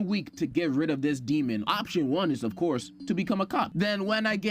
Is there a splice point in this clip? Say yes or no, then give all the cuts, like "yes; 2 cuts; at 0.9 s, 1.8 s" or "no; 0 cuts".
yes; 2 cuts; at 1.7 s, 3.7 s